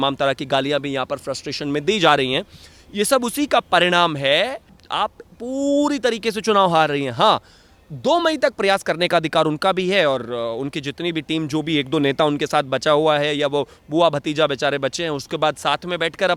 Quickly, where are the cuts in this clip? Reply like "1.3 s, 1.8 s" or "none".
none